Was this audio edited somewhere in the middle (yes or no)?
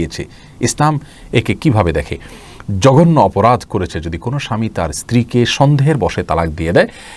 no